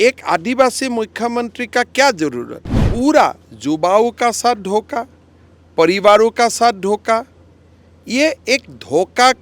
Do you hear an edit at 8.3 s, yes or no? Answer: no